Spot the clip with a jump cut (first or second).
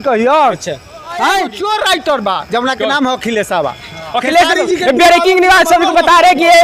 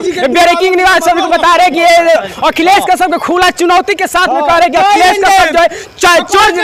first